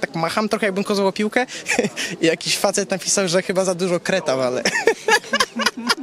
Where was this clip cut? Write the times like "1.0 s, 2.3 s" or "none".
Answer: none